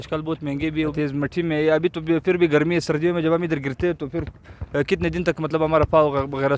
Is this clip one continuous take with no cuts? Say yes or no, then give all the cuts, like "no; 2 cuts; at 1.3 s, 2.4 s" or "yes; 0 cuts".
no; 1 cut; at 1.0 s